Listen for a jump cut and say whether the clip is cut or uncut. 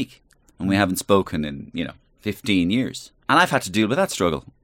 cut